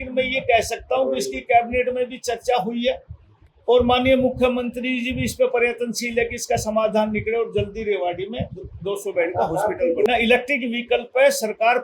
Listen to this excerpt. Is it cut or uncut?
cut